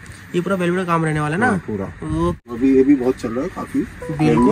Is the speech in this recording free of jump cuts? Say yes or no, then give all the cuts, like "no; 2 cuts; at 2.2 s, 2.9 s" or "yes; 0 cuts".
no; 1 cut; at 2.4 s